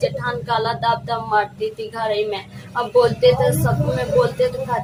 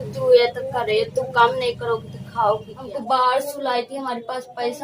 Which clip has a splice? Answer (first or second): second